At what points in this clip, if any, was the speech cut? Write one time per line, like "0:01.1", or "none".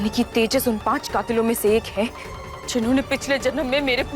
none